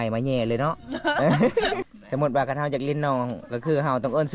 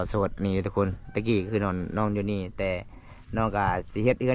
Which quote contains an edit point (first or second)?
first